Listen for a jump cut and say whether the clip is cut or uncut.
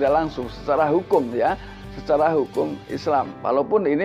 uncut